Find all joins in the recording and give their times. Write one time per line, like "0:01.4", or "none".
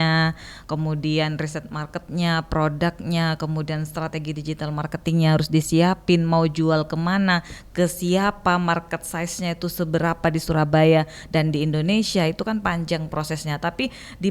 none